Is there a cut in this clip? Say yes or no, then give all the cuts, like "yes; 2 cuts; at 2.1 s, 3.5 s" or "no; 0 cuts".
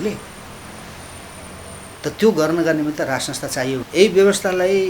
yes; 1 cut; at 3.9 s